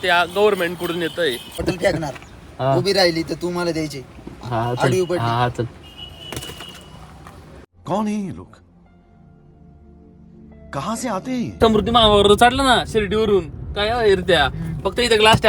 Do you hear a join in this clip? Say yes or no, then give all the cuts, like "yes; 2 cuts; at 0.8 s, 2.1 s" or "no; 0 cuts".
yes; 2 cuts; at 1.6 s, 11.6 s